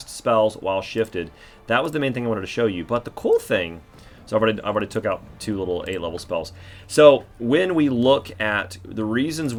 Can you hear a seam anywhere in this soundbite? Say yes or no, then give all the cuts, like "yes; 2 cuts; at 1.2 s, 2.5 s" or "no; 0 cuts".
no; 0 cuts